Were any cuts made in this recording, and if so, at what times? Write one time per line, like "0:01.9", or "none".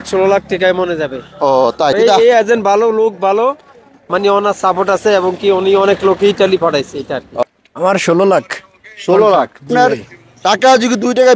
0:01.9
0:07.4
0:09.7